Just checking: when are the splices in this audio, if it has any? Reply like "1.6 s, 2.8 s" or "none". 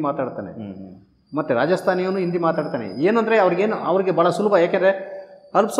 none